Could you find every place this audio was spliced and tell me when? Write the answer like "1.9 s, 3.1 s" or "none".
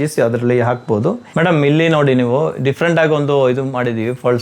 1.2 s